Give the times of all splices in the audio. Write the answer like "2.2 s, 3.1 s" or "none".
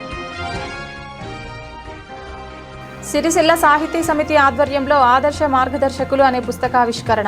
2.8 s